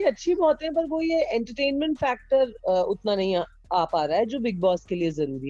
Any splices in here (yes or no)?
no